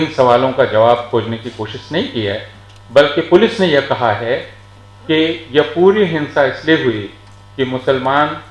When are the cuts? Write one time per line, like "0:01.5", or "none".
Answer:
none